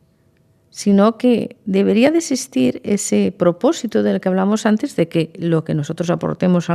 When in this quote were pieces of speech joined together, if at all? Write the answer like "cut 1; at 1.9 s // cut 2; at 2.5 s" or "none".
none